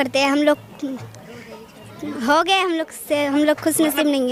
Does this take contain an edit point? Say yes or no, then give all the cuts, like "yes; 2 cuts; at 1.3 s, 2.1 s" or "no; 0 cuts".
no; 0 cuts